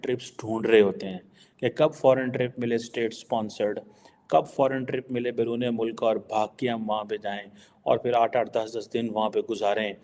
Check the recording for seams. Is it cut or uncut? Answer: uncut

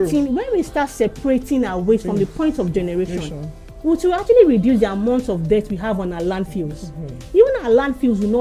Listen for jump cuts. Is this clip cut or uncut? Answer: uncut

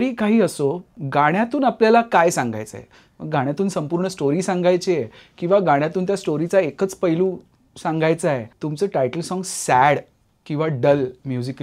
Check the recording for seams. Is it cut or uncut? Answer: cut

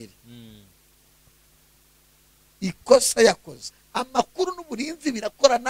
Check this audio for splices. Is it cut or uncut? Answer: cut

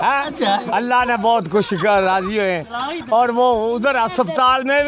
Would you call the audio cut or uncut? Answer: uncut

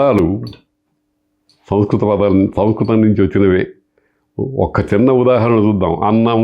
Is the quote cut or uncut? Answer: uncut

